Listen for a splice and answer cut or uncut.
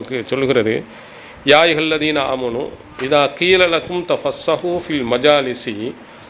uncut